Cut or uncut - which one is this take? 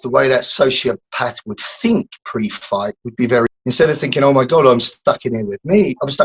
cut